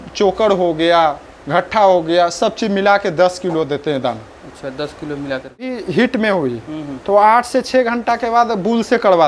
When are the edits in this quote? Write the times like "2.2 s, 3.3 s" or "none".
5.8 s